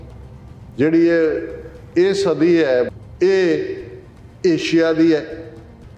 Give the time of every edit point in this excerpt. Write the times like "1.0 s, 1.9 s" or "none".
2.9 s